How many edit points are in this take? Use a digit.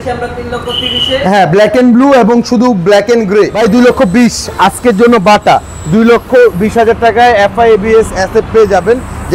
1